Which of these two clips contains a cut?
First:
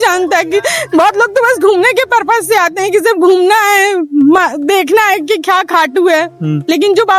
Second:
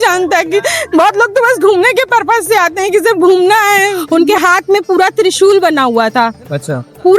second; 1 cut; at 4.0 s

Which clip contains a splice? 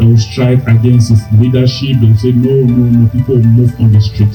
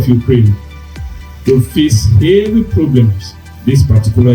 second; 1 cut; at 3.4 s

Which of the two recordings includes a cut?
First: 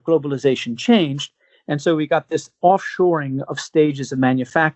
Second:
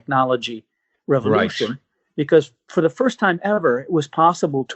second; 1 cut; at 2.7 s

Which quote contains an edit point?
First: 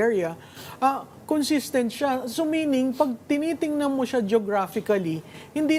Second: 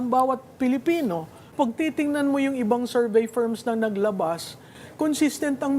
second; 1 cut; at 1.5 s

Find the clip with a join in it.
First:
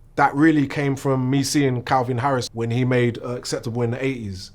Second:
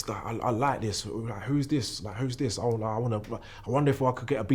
first; 1 cut; at 2.5 s

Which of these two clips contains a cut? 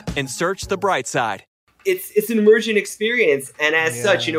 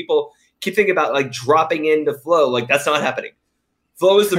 first; 1 cut; at 1.5 s

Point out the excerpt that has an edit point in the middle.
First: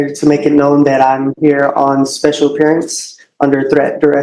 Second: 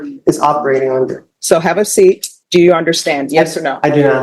second; 2 cuts; at 1.3 s, 2.3 s

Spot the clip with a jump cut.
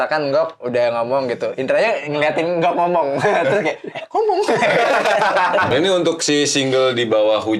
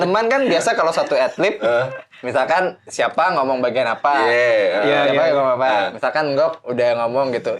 first; 1 cut; at 5.7 s

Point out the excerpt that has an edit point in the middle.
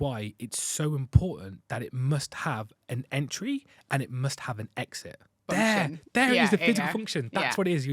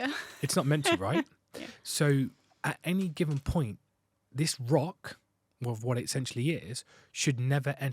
first; 1 cut; at 5.4 s

